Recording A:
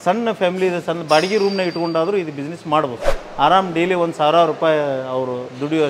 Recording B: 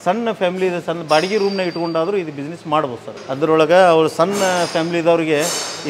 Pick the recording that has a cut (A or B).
A